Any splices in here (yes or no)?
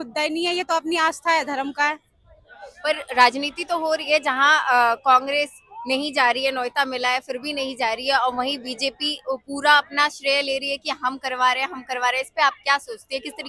no